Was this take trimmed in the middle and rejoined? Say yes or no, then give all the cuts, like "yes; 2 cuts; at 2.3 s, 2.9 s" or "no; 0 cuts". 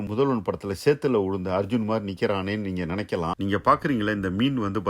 yes; 1 cut; at 3.3 s